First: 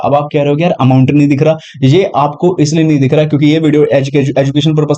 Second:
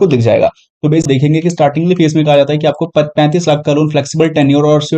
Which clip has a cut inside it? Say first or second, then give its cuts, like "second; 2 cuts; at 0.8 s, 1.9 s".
second; 1 cut; at 1.1 s